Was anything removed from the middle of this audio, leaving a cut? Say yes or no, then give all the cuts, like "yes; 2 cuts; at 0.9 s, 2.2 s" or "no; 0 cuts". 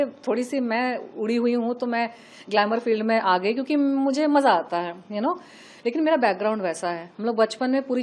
no; 0 cuts